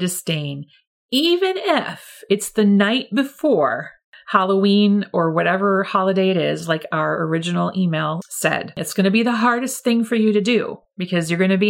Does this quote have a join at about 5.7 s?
no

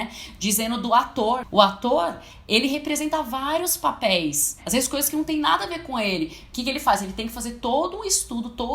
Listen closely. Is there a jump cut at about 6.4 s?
no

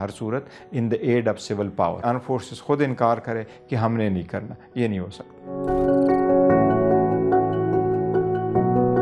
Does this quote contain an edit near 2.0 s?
yes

